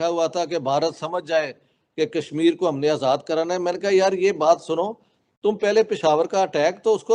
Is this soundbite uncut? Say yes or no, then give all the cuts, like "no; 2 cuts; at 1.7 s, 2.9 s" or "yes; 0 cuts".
yes; 0 cuts